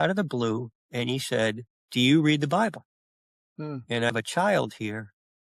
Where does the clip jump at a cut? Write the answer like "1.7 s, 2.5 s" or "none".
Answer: 1.7 s, 4.1 s